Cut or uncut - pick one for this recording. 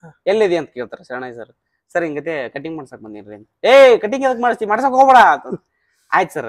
uncut